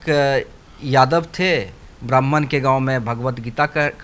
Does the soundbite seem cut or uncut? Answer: uncut